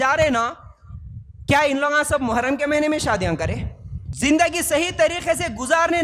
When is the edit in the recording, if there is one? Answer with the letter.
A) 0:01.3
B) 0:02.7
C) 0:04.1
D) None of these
C